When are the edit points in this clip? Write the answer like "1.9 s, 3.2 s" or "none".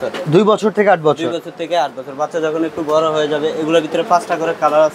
none